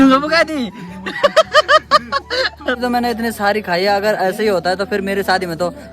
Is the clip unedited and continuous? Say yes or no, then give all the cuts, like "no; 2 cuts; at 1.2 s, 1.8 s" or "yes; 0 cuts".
no; 1 cut; at 2.8 s